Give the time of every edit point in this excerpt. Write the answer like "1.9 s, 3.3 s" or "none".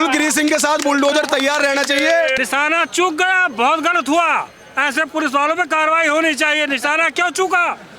2.4 s

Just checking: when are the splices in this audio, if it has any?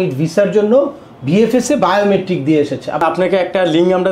3.0 s

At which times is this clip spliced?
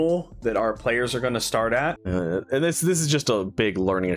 2.0 s

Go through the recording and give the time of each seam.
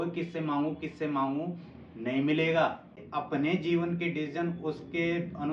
3.1 s

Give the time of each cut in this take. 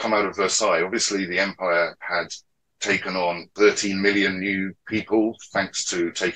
3.5 s

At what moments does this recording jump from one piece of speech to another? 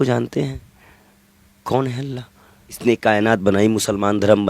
2.8 s

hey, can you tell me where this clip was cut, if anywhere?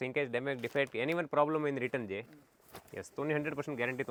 none

